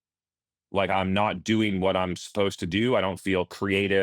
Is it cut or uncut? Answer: cut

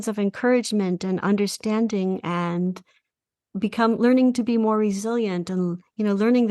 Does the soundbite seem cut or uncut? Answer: uncut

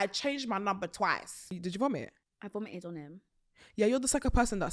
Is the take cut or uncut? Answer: cut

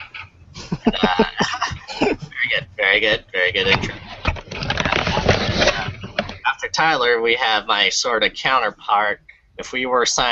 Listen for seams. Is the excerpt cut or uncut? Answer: cut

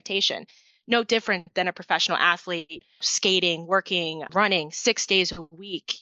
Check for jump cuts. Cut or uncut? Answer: cut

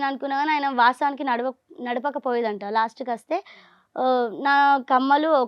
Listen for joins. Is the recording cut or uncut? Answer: uncut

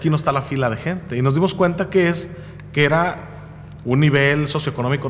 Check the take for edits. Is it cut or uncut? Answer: uncut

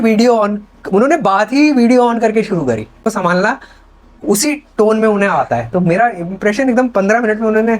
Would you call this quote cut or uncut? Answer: cut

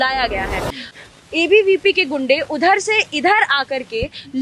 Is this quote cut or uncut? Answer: cut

